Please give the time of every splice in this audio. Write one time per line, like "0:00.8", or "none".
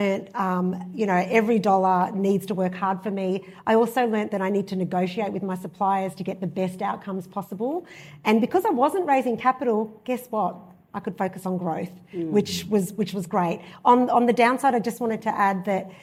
none